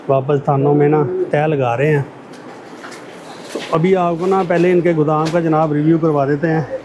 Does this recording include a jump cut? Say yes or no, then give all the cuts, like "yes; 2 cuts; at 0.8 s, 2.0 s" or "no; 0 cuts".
no; 0 cuts